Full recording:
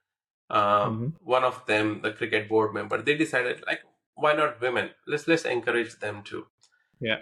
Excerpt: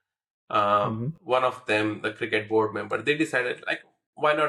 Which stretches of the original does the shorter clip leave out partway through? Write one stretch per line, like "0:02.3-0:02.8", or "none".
none